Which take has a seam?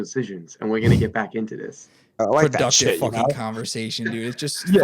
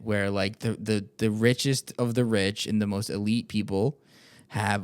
first; 1 cut; at 2.1 s

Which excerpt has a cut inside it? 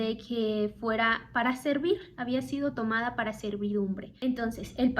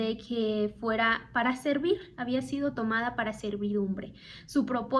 first; 1 cut; at 4.1 s

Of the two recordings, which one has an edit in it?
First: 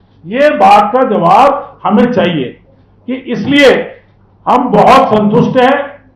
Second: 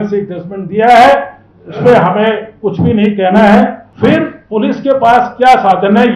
second; 1 cut; at 3.8 s

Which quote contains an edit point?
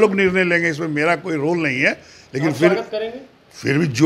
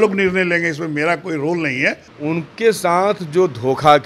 second; 1 cut; at 2.1 s

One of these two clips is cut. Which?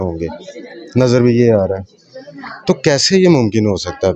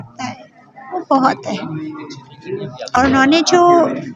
second; 1 cut; at 3.0 s

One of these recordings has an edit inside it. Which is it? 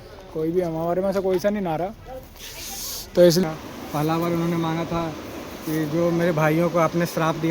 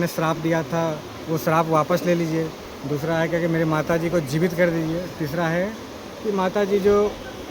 first; 1 cut; at 3.4 s

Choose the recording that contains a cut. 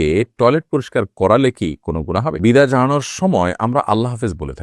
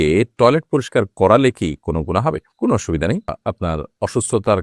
first; 1 cut; at 2.4 s

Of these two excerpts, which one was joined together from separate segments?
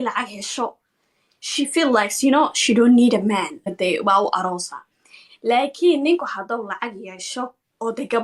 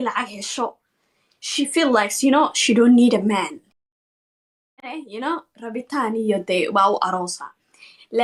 first; 1 cut; at 3.7 s

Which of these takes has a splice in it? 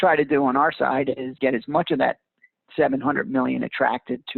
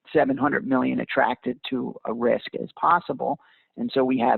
first; 1 cut; at 1.4 s

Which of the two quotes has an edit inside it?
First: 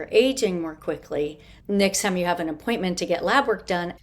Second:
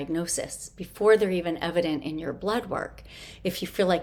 first; 1 cut; at 1.5 s

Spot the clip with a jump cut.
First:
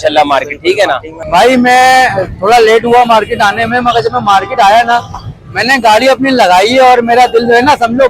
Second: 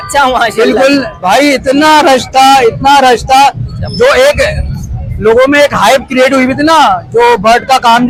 first; 1 cut; at 1.1 s

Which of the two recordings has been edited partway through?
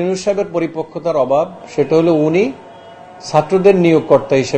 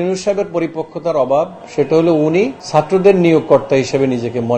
second; 1 cut; at 2.6 s

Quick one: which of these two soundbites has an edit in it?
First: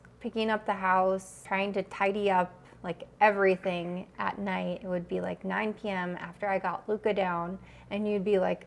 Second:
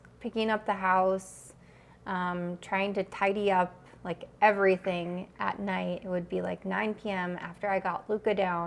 first; 1 cut; at 1.4 s

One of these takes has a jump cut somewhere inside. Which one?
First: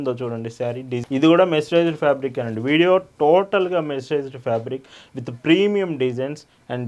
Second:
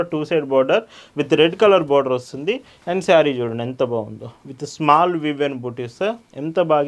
first; 1 cut; at 0.9 s

